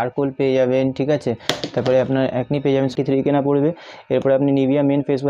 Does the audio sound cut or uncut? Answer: cut